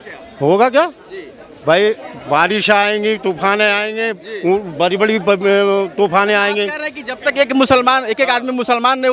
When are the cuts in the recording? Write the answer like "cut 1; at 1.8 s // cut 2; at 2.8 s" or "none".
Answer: none